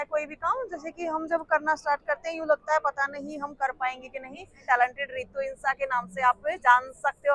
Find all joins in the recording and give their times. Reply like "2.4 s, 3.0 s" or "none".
4.6 s